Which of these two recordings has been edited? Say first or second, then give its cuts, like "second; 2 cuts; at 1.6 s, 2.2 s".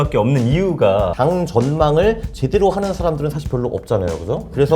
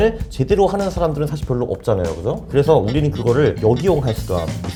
first; 1 cut; at 1.1 s